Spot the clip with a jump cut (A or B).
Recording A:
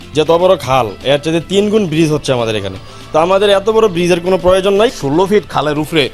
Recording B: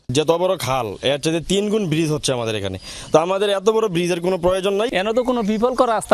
A